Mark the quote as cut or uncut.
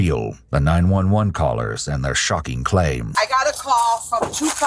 cut